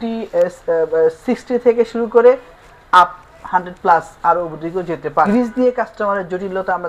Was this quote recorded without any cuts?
no; 1 cut; at 5.3 s

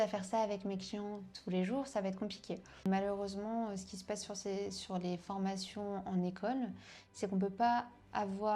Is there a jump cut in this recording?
yes; 1 cut; at 2.7 s

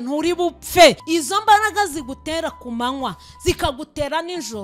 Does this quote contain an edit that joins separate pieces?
yes; 1 cut; at 1.0 s

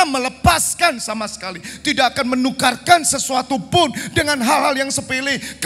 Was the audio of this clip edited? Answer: no; 0 cuts

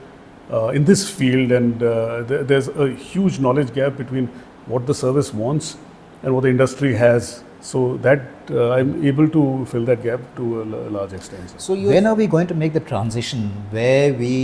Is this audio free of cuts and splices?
no; 1 cut; at 11.8 s

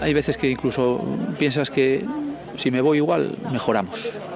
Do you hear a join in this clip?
no; 0 cuts

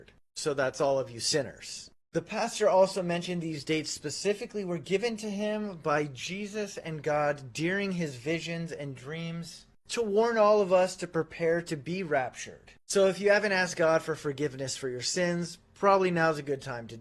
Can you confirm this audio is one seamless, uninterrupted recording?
yes; 0 cuts

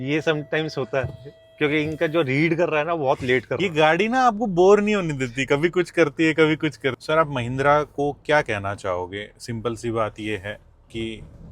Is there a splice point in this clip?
yes; 1 cut; at 7.0 s

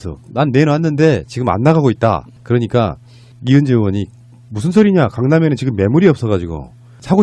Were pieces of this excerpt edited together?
yes; 1 cut; at 5.1 s

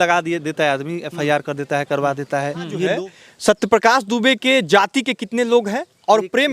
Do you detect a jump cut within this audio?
yes; 1 cut; at 2.9 s

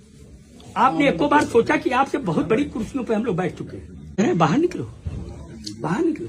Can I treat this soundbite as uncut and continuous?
no; 1 cut; at 4.2 s

